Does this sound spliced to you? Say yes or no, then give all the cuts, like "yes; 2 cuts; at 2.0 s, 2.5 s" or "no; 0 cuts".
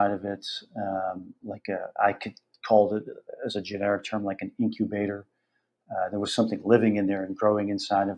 no; 0 cuts